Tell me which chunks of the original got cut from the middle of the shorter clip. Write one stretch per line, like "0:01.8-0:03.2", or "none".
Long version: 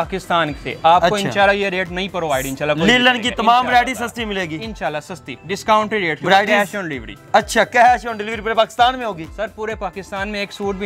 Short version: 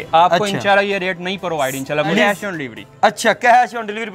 0:02.9-0:06.5